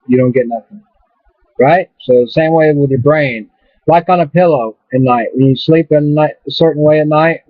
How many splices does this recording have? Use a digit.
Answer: 1